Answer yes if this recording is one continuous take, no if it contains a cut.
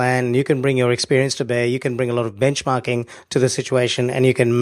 no